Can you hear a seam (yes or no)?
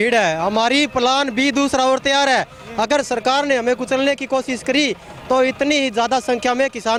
no